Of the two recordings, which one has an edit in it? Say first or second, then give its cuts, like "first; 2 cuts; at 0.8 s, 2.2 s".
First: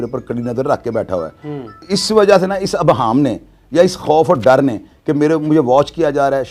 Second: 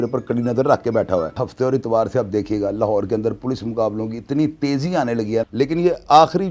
second; 2 cuts; at 1.4 s, 5.5 s